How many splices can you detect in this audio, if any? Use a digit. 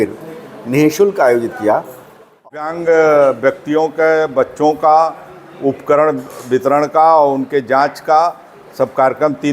1